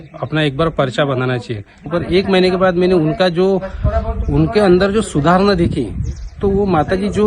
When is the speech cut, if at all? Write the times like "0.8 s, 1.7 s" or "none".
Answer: 1.8 s